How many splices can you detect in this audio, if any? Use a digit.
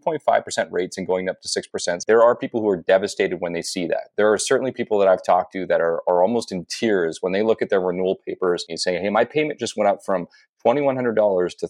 2